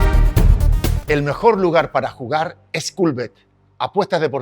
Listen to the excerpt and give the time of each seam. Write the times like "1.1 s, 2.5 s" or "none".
1.1 s